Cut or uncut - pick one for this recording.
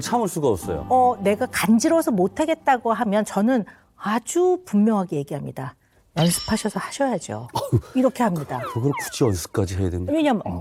uncut